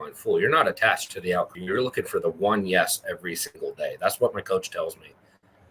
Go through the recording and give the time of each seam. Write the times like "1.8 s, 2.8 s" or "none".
1.6 s